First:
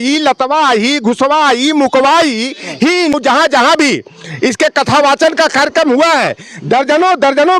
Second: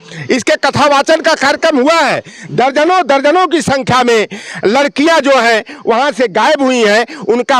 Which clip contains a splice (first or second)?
first